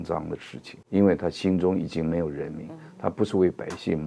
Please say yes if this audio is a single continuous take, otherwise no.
yes